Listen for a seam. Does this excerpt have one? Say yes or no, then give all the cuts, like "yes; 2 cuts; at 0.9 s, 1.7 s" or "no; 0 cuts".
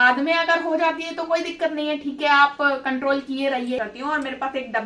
yes; 1 cut; at 3.8 s